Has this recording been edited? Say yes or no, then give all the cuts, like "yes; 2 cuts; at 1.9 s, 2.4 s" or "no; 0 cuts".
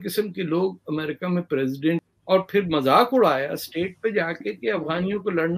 yes; 1 cut; at 2.0 s